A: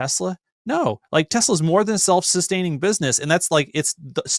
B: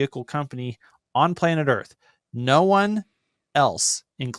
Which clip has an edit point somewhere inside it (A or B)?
A